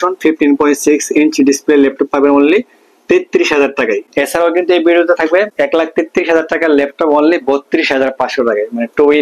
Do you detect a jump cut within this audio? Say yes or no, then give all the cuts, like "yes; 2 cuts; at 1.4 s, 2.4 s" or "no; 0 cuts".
no; 0 cuts